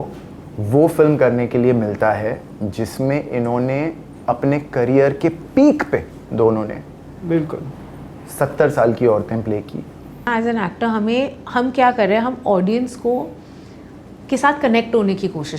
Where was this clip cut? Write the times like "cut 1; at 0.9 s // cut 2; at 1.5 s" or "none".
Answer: cut 1; at 10.3 s